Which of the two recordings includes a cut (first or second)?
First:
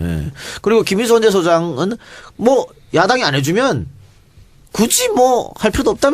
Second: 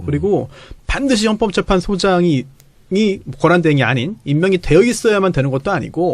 second